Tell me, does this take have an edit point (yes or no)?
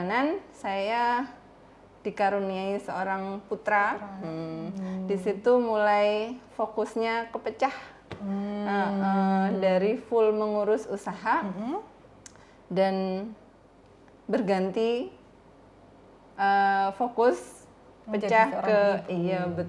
no